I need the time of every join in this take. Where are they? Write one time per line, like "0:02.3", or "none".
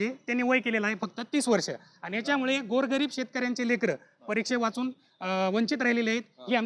none